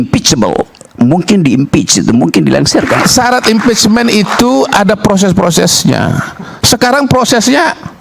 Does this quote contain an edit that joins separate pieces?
yes; 1 cut; at 3.0 s

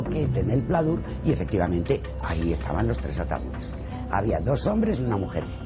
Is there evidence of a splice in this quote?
no; 0 cuts

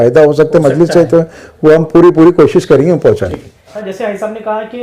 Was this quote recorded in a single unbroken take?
no; 1 cut; at 3.8 s

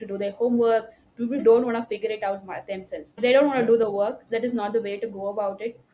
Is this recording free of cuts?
no; 3 cuts; at 1.4 s, 3.2 s, 4.2 s

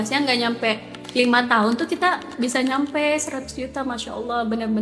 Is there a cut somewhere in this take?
no; 0 cuts

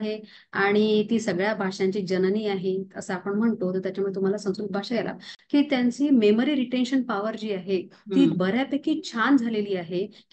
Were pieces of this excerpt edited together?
yes; 1 cut; at 5.3 s

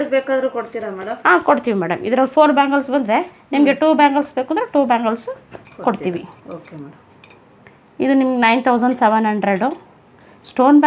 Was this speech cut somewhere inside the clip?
no; 0 cuts

